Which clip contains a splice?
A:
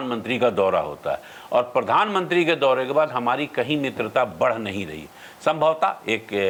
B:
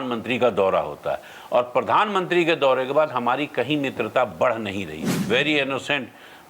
B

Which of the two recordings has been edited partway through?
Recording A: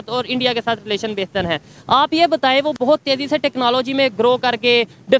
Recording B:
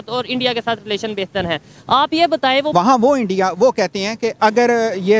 B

